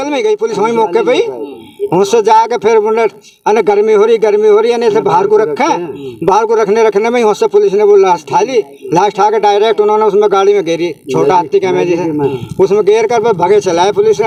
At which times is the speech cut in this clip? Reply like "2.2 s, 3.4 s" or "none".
none